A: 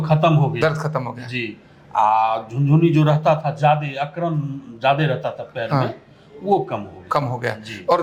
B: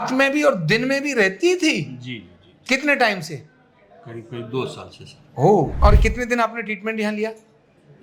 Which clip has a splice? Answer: B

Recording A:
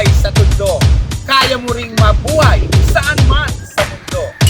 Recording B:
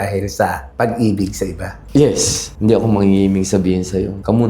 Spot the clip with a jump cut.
B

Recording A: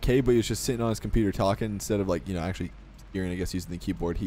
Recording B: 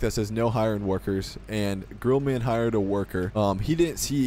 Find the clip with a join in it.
B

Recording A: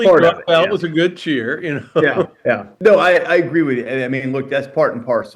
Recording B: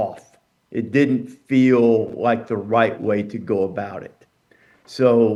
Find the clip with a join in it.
A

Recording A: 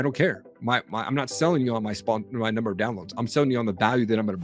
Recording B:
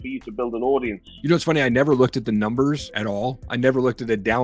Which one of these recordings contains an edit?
B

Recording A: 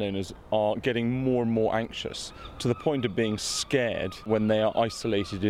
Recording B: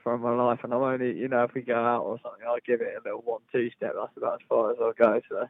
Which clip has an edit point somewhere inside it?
A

